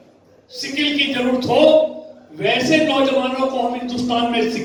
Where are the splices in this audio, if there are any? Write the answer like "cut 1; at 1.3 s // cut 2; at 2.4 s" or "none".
none